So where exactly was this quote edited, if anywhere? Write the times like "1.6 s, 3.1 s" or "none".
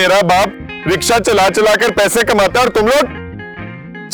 none